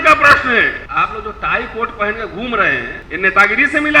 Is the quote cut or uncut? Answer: cut